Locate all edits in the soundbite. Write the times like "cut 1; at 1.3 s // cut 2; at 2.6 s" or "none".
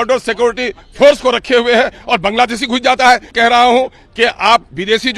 cut 1; at 3.3 s